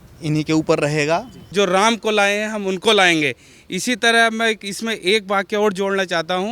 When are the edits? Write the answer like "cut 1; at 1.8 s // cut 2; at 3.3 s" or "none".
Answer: cut 1; at 1.5 s

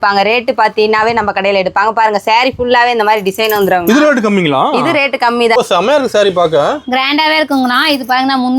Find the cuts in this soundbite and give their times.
cut 1; at 5.6 s

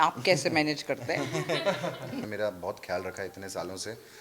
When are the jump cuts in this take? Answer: cut 1; at 2.2 s

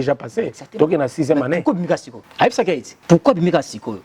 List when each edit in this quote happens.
cut 1; at 2.2 s // cut 2; at 2.9 s

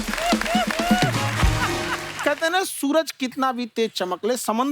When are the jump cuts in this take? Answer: cut 1; at 2.0 s

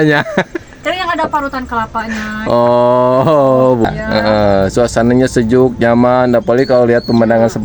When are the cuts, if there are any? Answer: cut 1; at 3.8 s

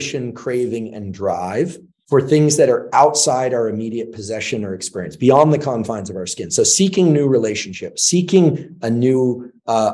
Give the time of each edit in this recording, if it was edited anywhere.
none

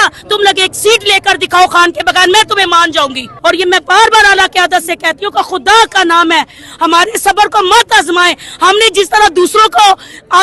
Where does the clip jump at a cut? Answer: cut 1; at 3.2 s

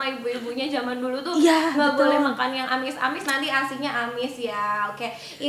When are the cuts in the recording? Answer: none

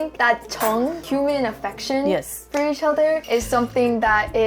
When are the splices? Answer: none

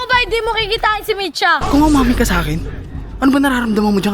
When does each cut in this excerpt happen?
cut 1; at 1.6 s

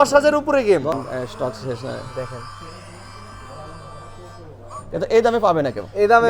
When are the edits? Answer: cut 1; at 0.9 s

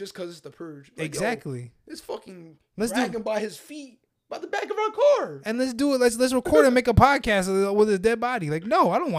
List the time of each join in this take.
none

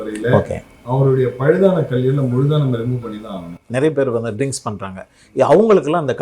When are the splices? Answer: cut 1; at 3.6 s

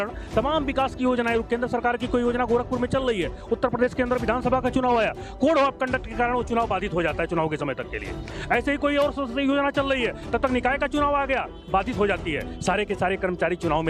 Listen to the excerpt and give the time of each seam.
none

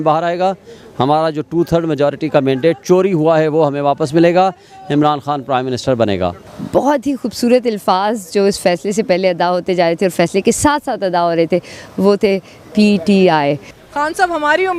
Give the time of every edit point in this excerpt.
cut 1; at 6.5 s // cut 2; at 13.7 s

